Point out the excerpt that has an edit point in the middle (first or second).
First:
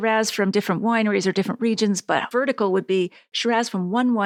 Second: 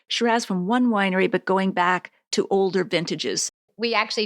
second